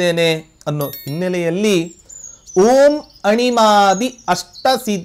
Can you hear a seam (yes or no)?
no